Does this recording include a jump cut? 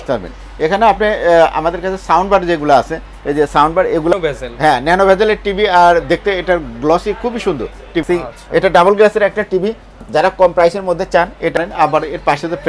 yes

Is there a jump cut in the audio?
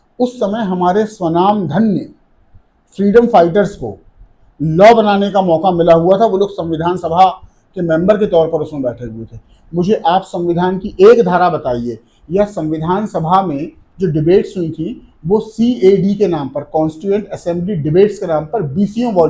no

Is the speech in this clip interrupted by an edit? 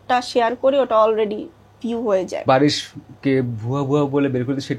yes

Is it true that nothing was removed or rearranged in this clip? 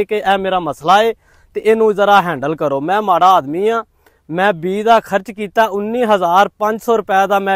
yes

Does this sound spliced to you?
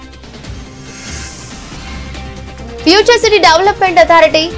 yes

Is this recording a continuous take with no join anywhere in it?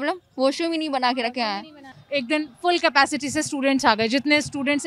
no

